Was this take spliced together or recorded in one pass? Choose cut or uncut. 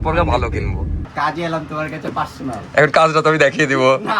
cut